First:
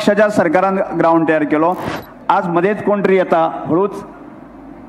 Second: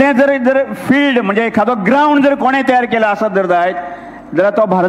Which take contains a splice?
first; 1 cut; at 1.9 s

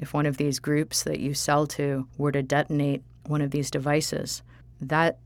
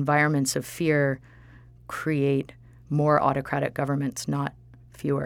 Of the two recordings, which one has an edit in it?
first; 3 cuts; at 2.1 s, 3.1 s, 4.4 s

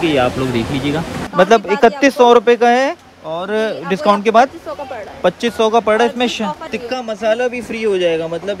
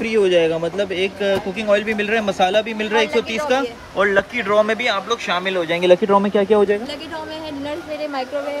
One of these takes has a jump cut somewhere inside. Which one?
first; 2 cuts; at 1.2 s, 6.6 s

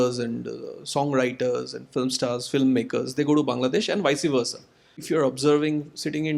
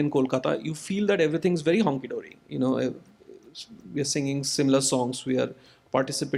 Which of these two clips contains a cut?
first; 2 cuts; at 1.8 s, 5.0 s

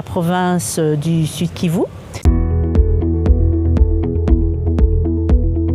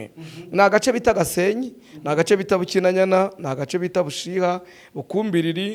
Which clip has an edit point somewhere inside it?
first; 1 cut; at 2.2 s

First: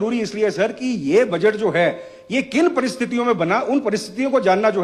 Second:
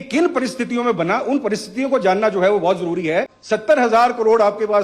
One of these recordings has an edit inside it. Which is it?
second; 1 cut; at 3.4 s

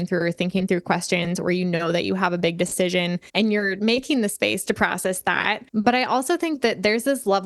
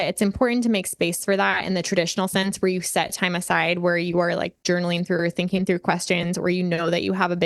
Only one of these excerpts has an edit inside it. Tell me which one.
first; 2 cuts; at 3.6 s, 5.6 s

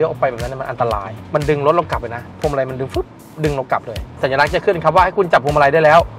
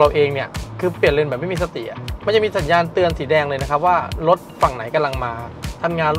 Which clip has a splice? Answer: first; 2 cuts; at 1.1 s, 4.1 s

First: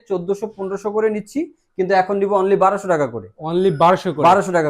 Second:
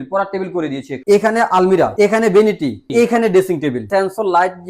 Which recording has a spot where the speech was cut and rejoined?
second; 4 cuts; at 0.9 s, 1.9 s, 2.9 s, 3.8 s

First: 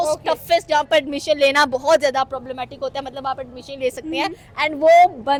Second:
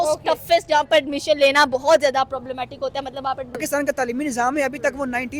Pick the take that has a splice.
second; 1 cut; at 3.6 s

